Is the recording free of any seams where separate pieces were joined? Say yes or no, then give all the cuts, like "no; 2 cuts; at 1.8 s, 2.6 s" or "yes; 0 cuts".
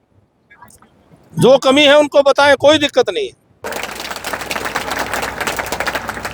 no; 1 cut; at 3.8 s